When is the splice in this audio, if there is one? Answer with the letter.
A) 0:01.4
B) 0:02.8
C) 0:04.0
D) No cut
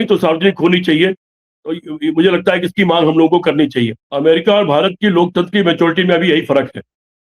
C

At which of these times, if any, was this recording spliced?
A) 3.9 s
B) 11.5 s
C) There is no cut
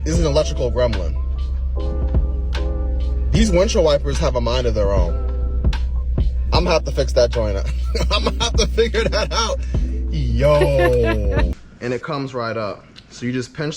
B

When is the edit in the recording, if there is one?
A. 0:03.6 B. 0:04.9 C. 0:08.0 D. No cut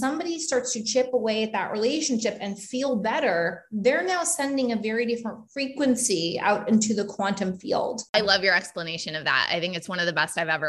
C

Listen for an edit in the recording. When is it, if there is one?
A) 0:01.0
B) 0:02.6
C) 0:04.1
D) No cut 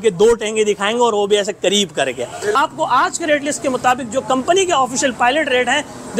B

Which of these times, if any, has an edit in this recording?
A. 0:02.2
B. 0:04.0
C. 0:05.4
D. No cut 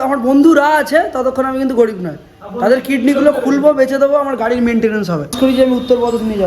C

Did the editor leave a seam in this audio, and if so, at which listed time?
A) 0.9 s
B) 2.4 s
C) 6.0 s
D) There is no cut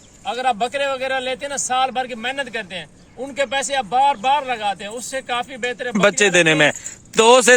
C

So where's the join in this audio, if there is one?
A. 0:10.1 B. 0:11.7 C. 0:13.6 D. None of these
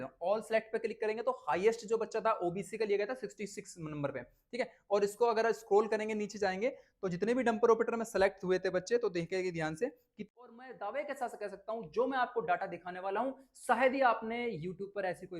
A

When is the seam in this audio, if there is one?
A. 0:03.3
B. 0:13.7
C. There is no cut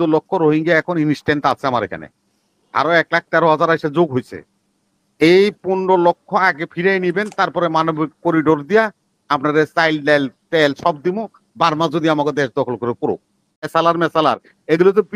B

